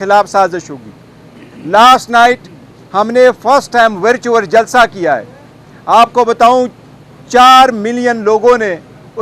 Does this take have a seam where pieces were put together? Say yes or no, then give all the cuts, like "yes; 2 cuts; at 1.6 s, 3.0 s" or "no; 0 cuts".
no; 0 cuts